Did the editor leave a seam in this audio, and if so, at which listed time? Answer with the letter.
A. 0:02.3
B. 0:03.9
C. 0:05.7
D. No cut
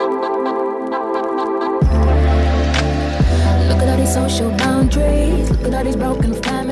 D